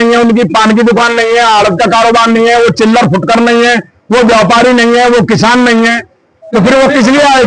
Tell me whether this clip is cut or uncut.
uncut